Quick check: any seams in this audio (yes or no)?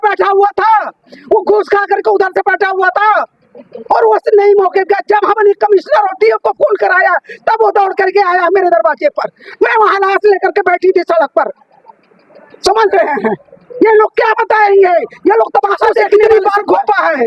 yes